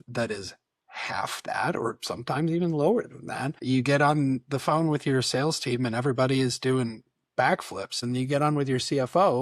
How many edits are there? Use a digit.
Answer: 2